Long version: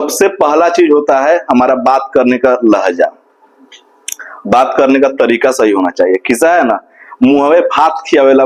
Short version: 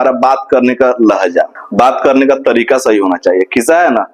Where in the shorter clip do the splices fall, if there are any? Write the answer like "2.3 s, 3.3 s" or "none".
1.6 s